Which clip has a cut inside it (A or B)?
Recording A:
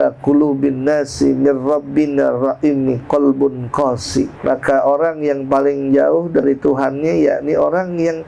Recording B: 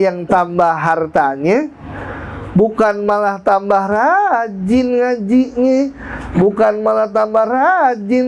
A